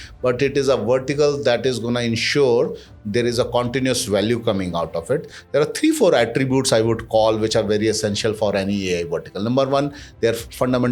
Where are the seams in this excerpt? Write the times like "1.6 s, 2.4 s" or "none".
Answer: none